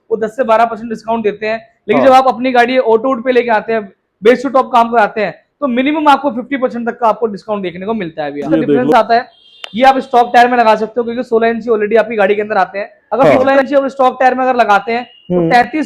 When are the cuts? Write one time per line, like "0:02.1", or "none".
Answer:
0:08.9
0:13.4